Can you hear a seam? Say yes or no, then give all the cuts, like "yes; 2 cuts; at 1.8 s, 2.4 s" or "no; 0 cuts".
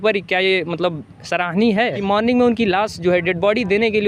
yes; 1 cut; at 2.0 s